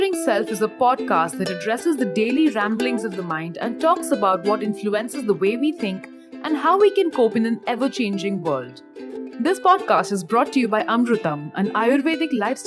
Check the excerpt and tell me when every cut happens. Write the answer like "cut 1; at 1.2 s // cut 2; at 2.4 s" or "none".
none